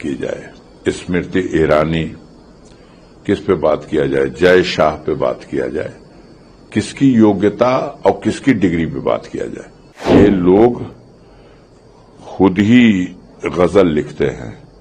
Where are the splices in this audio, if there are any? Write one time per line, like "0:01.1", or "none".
0:10.1